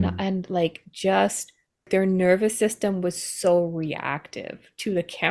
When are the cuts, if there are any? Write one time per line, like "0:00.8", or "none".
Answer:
0:01.9